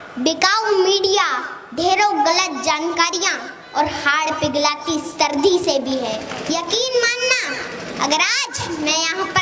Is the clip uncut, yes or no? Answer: no